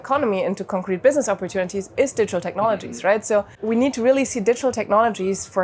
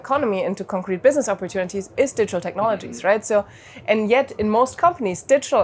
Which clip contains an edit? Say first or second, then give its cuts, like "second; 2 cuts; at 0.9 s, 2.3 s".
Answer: first; 1 cut; at 3.5 s